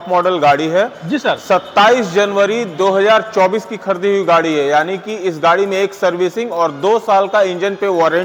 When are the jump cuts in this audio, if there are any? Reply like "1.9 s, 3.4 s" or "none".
none